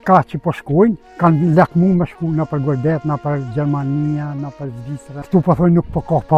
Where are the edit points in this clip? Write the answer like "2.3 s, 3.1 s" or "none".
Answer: 1.1 s, 5.1 s